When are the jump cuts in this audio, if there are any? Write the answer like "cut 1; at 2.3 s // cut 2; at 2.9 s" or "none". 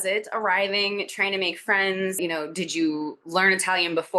none